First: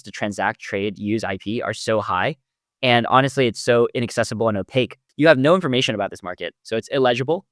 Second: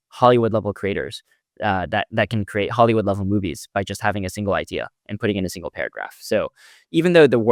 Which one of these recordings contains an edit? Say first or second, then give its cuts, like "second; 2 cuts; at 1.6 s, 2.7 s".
first; 1 cut; at 5.0 s